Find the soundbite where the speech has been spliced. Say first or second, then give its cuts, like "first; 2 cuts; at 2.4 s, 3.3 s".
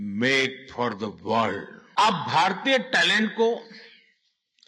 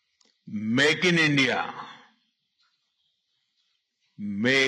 first; 1 cut; at 1.8 s